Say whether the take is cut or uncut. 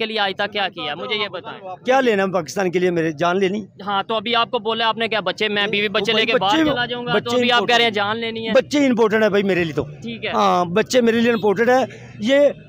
uncut